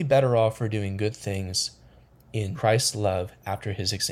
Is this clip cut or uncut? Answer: cut